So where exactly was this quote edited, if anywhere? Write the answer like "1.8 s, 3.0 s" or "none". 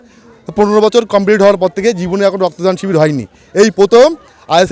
none